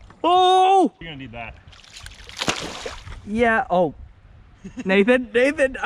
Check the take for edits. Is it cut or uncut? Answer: cut